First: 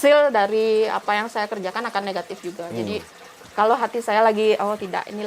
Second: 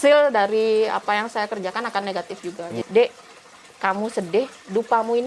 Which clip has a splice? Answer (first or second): second